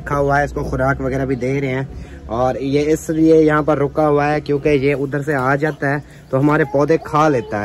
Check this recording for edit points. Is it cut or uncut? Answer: uncut